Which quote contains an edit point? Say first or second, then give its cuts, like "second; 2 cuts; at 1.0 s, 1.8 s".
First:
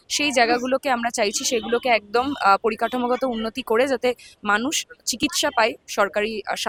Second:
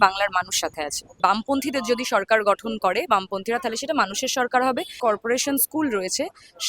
second; 2 cuts; at 1.0 s, 5.0 s